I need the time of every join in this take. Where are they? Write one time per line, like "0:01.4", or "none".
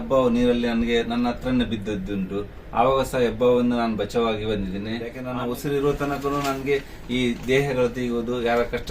0:05.2